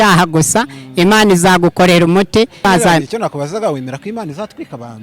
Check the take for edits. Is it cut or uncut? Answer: cut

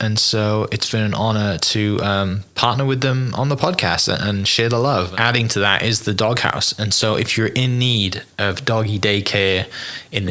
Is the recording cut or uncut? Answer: cut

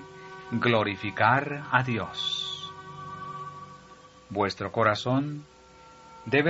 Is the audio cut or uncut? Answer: cut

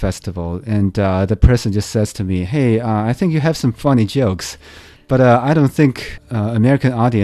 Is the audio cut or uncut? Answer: cut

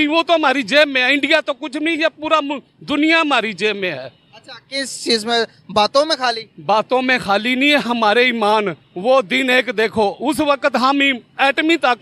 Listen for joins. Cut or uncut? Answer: uncut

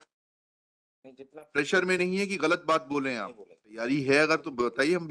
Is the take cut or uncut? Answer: cut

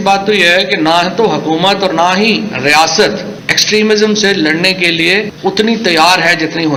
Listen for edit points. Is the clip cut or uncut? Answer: uncut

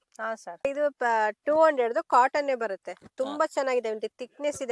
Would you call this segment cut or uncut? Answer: uncut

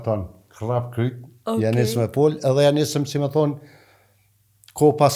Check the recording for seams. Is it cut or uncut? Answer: uncut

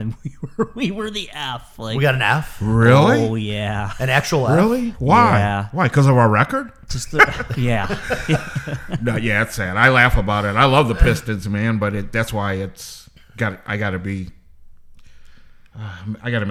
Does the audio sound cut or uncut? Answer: uncut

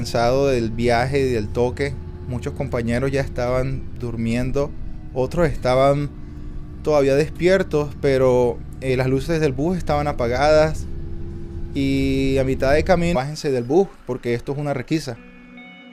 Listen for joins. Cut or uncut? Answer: uncut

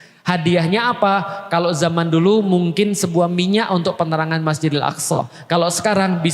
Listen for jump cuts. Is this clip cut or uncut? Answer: uncut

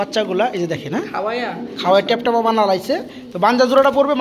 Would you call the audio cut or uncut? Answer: uncut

